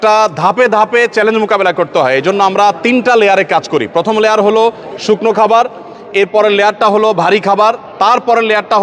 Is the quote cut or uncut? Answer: uncut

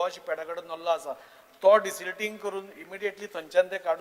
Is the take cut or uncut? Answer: uncut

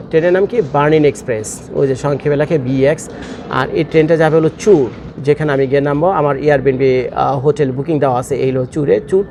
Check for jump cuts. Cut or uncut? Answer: uncut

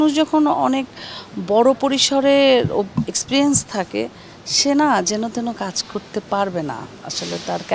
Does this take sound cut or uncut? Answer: uncut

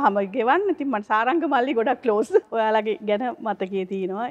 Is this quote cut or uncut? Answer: cut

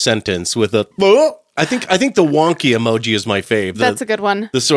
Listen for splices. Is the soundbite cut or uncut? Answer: uncut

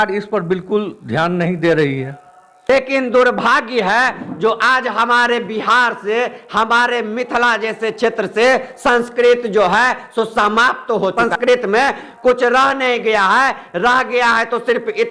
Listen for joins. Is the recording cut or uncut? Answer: cut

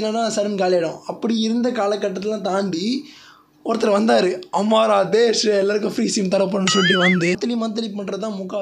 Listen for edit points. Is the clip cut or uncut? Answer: cut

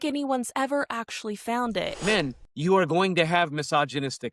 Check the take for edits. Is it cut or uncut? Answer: cut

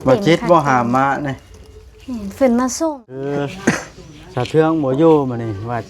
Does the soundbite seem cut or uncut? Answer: cut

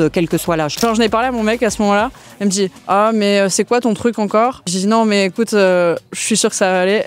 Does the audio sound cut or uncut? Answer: cut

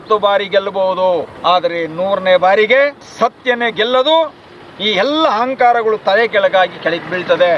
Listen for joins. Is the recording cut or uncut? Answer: cut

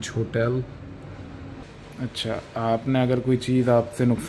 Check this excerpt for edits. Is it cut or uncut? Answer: cut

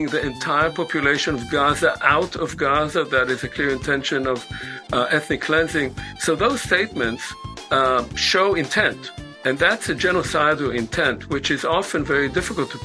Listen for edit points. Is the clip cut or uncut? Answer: uncut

